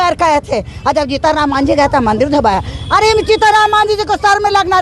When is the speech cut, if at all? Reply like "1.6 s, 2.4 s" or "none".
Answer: none